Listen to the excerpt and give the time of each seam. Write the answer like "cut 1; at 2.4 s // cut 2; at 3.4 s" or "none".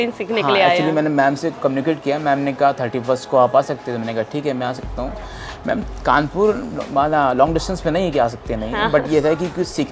none

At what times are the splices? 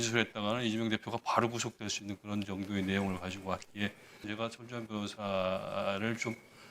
cut 1; at 4.2 s

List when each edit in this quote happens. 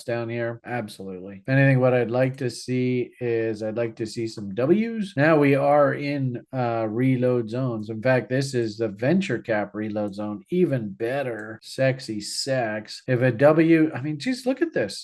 none

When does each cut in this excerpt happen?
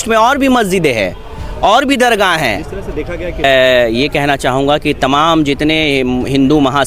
cut 1; at 3.4 s

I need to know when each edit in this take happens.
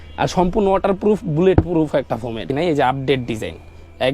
cut 1; at 2.5 s

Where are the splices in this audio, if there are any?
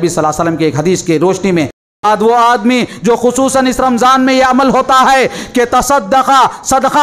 cut 1; at 2.0 s

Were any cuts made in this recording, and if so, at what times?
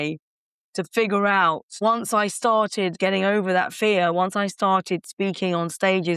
cut 1; at 1.7 s // cut 2; at 2.9 s

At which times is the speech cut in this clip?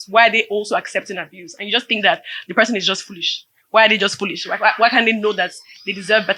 none

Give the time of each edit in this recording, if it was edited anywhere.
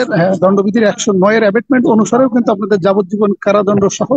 none

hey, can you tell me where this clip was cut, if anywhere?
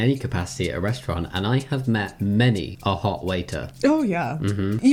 none

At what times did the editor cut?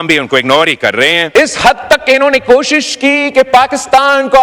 cut 1; at 1.2 s

